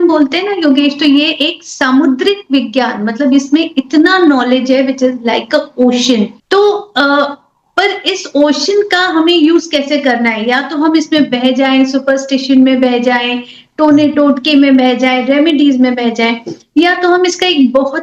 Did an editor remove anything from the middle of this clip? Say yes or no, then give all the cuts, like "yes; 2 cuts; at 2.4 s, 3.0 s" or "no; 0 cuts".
no; 0 cuts